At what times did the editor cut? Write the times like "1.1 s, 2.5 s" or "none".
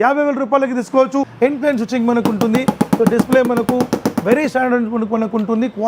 1.3 s